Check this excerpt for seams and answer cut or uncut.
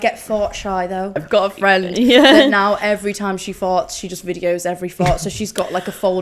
cut